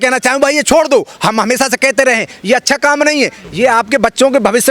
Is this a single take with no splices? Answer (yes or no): yes